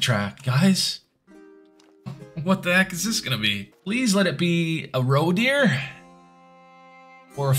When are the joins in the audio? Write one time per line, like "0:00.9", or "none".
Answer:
0:03.7